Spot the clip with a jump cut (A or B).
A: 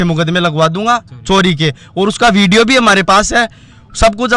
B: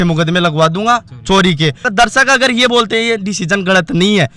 B